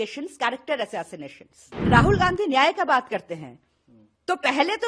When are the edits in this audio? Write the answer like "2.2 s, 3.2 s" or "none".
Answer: 1.7 s